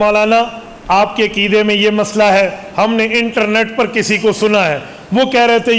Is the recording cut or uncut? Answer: uncut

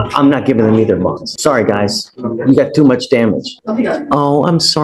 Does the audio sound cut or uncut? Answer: cut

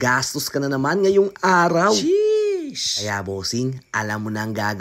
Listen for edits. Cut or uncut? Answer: uncut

